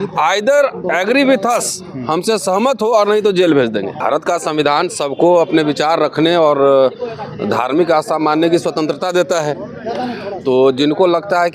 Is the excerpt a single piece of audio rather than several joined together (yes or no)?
no